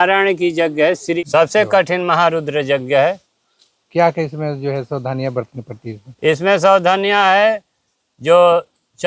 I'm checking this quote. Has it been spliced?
yes; 1 cut; at 1.2 s

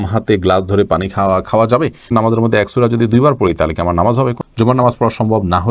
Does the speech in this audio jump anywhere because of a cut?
yes; 2 cuts; at 2.1 s, 4.4 s

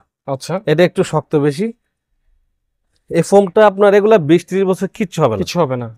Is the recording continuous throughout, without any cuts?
yes; 0 cuts

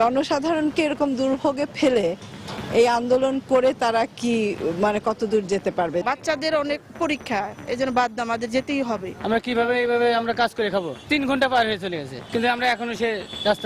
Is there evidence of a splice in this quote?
yes; 4 cuts; at 6.0 s, 9.1 s, 11.1 s, 12.2 s

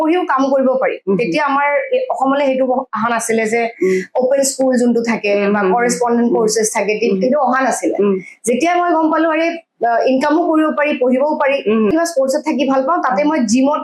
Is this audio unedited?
no; 1 cut; at 11.9 s

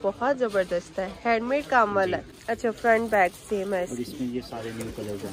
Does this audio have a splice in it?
no; 0 cuts

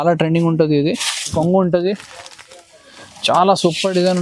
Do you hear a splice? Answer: yes; 1 cut; at 1.3 s

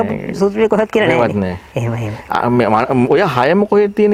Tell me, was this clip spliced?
no; 0 cuts

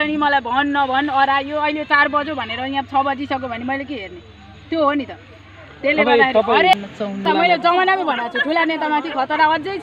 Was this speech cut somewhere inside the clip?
yes; 1 cut; at 7.2 s

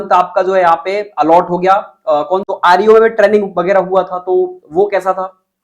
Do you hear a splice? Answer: yes; 1 cut; at 2.4 s

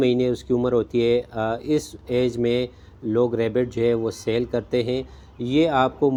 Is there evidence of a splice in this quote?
no; 0 cuts

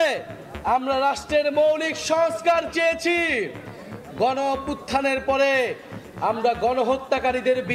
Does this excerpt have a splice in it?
no; 0 cuts

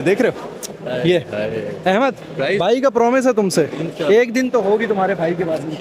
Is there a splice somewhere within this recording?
no; 0 cuts

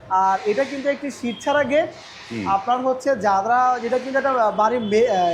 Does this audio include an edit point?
no; 0 cuts

